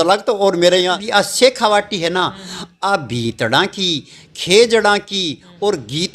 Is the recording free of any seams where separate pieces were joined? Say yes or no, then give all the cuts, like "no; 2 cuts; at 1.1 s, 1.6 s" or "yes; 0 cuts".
no; 1 cut; at 1.0 s